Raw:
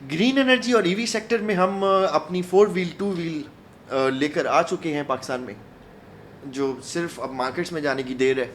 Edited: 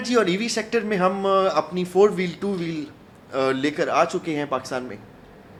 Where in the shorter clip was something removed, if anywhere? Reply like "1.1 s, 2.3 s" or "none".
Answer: none